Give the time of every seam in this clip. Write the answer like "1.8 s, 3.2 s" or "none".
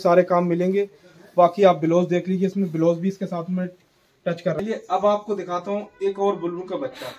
4.6 s